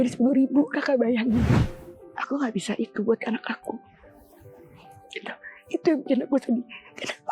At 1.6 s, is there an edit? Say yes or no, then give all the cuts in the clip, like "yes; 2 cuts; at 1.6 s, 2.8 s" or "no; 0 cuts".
yes; 1 cut; at 1.6 s